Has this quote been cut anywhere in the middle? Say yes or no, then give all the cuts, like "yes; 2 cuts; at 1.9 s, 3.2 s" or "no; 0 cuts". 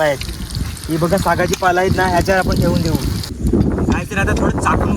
yes; 1 cut; at 3.2 s